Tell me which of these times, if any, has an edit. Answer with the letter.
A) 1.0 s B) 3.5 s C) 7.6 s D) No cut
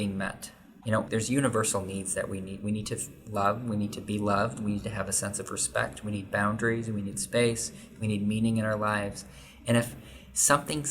A